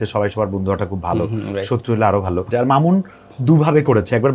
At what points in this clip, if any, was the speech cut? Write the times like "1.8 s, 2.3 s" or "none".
2.5 s